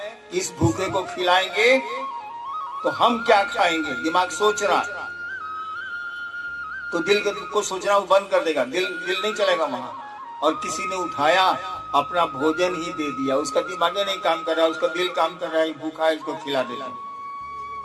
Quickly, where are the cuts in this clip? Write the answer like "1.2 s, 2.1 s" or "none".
16.8 s